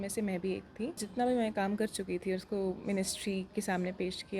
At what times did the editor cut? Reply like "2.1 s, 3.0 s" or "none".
1.0 s